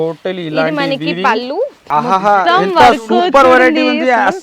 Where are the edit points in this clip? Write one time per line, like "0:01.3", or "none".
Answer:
0:01.8